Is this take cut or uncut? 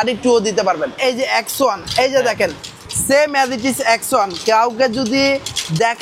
cut